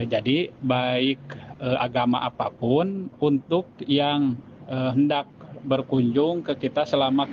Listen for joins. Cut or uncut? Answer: uncut